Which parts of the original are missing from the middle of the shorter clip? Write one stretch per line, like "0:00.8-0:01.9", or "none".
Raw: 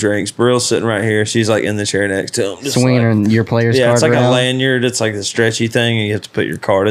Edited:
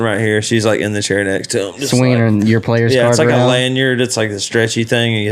none

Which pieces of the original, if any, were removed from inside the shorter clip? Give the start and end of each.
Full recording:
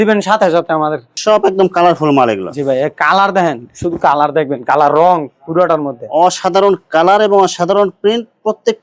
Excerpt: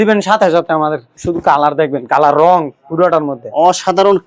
0:01.1-0:03.7

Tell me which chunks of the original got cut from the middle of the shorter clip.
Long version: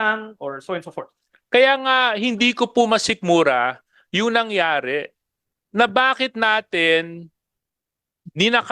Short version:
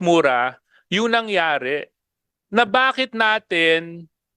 none

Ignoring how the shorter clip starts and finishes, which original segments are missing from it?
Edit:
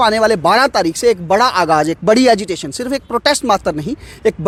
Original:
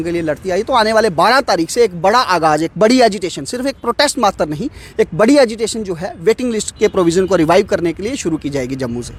none

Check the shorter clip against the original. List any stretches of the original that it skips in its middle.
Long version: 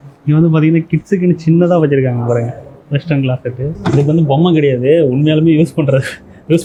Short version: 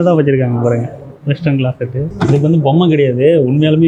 none

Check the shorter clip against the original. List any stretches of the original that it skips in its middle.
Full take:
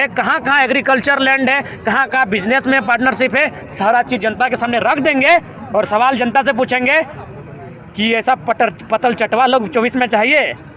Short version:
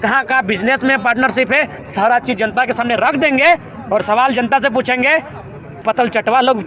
0:07.6-0:08.8

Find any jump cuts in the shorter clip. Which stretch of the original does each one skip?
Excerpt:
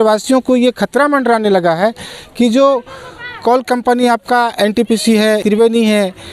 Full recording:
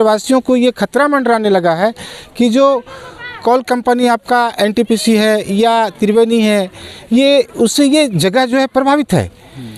0:05.4-0:06.0

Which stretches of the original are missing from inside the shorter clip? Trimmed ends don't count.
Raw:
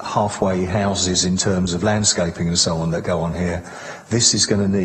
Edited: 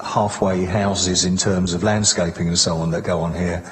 none

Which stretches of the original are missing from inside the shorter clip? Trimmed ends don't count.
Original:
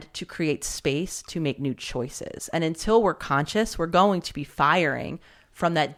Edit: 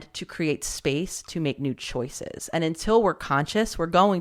none

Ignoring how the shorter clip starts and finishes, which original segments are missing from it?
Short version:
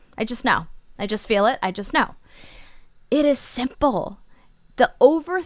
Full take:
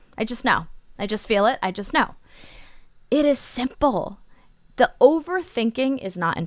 none

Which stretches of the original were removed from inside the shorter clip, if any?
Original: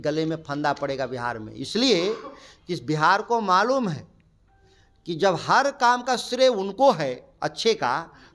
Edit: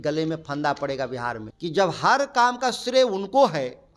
0:01.4-0:04.9

